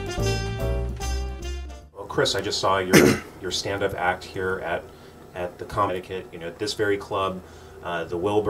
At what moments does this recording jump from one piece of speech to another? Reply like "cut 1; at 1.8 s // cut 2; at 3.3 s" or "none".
none